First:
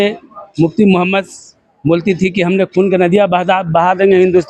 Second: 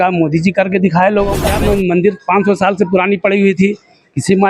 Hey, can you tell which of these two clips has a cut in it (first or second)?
second